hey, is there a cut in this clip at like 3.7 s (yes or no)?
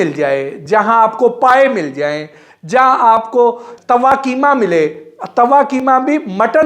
yes